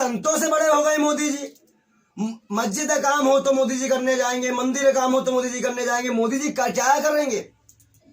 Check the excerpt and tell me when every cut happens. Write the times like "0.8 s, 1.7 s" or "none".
none

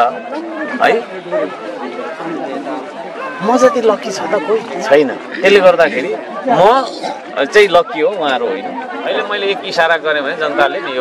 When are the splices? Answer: 9.2 s

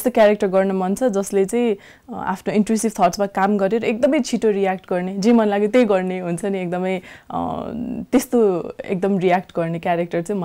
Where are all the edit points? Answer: none

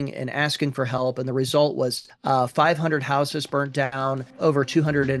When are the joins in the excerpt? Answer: 2.1 s, 4.3 s

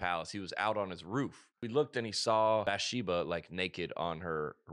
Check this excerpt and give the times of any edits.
1.5 s, 2.6 s

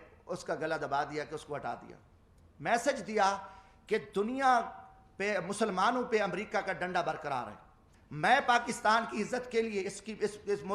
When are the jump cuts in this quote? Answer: 7.9 s

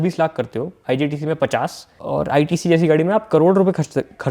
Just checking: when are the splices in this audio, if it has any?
1.9 s

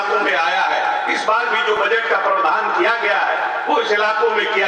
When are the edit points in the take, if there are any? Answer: none

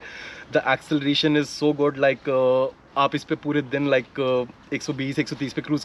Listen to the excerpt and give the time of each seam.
none

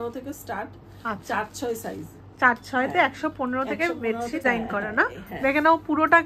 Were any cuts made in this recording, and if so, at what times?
4.4 s

